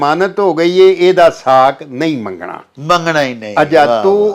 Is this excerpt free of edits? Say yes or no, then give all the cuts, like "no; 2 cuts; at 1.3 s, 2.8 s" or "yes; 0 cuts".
yes; 0 cuts